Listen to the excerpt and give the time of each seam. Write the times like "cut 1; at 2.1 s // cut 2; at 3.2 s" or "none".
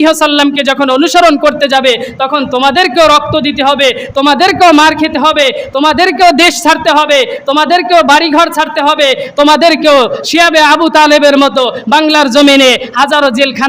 none